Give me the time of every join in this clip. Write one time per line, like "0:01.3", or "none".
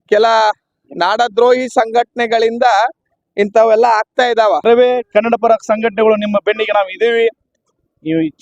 0:04.6